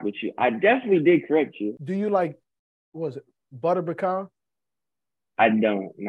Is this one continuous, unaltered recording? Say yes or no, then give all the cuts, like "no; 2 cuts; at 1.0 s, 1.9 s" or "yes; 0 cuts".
no; 1 cut; at 1.7 s